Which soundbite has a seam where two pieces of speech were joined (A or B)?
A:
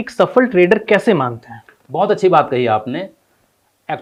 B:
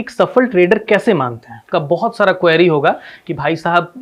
B